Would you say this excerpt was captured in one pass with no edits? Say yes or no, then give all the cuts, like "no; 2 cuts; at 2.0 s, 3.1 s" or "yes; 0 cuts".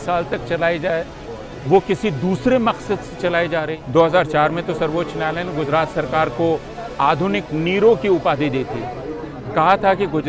no; 1 cut; at 3.8 s